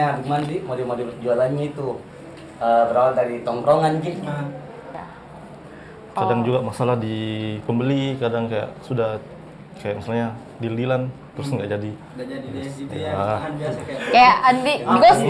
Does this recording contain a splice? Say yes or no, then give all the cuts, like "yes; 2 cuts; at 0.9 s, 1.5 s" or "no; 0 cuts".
yes; 1 cut; at 4.8 s